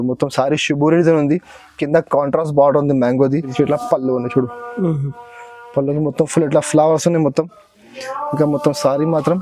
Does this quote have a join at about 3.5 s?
yes; 1 cut; at 3.5 s

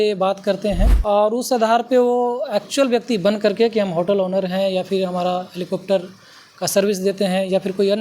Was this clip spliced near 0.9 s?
yes; 1 cut; at 0.9 s

